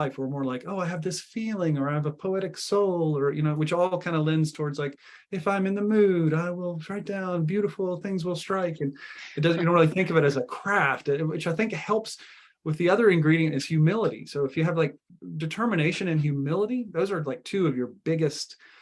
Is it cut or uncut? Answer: uncut